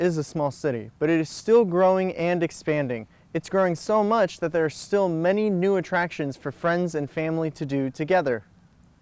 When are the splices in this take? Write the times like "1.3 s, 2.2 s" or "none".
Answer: none